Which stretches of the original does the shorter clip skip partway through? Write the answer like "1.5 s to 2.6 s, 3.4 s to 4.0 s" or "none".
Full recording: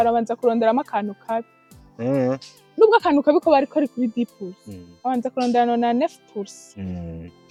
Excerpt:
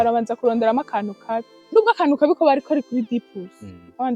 1.5 s to 2.6 s